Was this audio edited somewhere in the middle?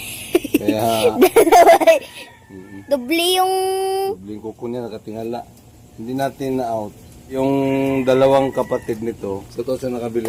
no; 0 cuts

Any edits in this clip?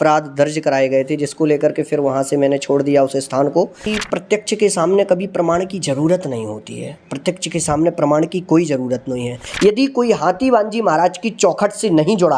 yes; 2 cuts; at 3.9 s, 9.4 s

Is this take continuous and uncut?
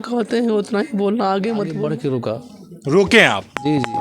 no; 1 cut; at 1.9 s

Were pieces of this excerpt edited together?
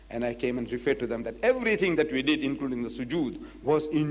yes; 1 cut; at 1.4 s

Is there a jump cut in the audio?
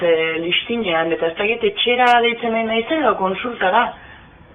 no; 0 cuts

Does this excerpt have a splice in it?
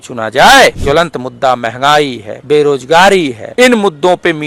yes; 3 cuts; at 0.8 s, 2.3 s, 3.4 s

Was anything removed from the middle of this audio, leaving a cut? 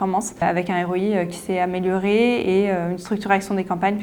no; 0 cuts

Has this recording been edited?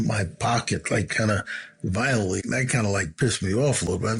yes; 1 cut; at 2.4 s

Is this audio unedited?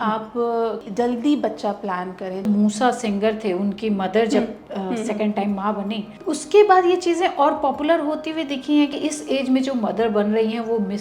no; 4 cuts; at 0.9 s, 2.4 s, 6.1 s, 8.9 s

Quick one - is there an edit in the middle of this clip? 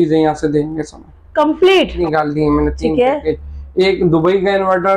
yes; 1 cut; at 2.0 s

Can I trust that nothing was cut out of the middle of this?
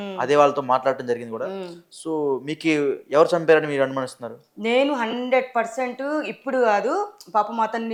yes; 0 cuts

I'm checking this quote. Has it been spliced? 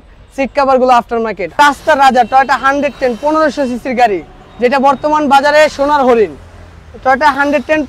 yes; 1 cut; at 1.6 s

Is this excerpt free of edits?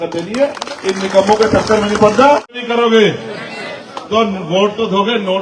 no; 1 cut; at 2.6 s

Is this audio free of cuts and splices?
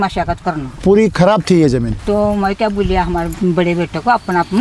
no; 3 cuts; at 0.8 s, 1.9 s, 3.3 s

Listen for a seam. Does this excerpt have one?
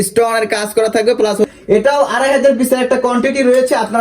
yes; 1 cut; at 1.5 s

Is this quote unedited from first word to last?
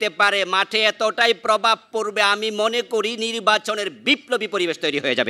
yes; 0 cuts

